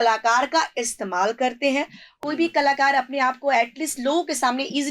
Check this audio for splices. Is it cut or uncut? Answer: cut